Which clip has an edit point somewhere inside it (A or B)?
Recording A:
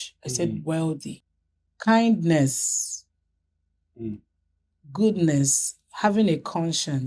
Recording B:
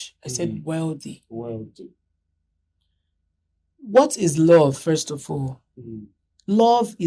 A